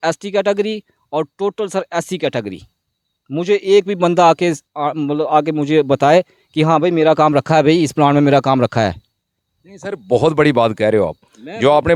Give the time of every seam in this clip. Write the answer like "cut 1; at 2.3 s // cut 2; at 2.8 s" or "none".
none